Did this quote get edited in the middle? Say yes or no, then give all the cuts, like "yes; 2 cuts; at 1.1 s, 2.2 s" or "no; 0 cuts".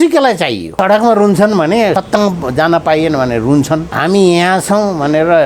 yes; 3 cuts; at 0.7 s, 2.0 s, 3.9 s